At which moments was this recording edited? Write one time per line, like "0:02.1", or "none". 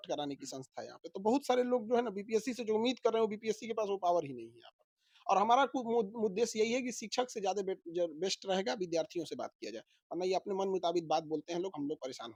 none

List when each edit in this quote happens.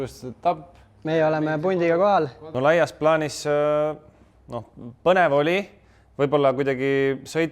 0:02.4

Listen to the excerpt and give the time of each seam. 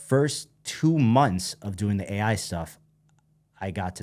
none

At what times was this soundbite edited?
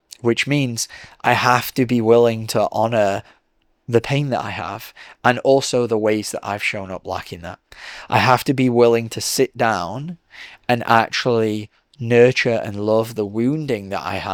none

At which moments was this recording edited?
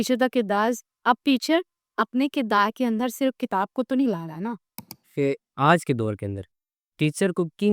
0:05.1

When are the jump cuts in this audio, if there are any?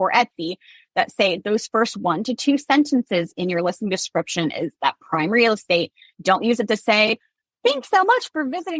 none

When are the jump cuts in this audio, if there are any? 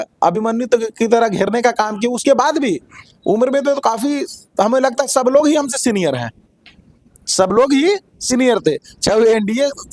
none

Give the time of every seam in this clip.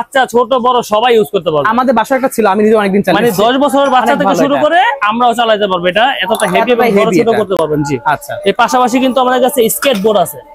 none

